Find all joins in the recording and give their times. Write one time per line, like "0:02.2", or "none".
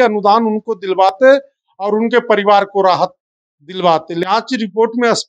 0:04.2

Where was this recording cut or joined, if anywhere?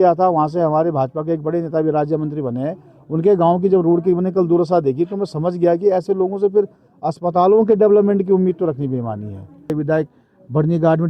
0:09.7

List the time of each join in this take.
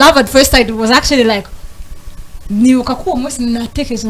none

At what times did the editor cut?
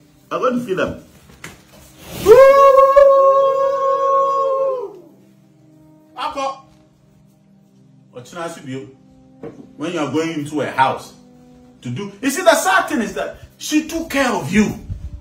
none

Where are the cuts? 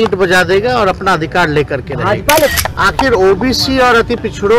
0:02.5

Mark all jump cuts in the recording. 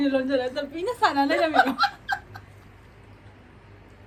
none

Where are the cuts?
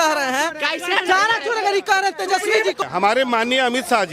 0:02.8

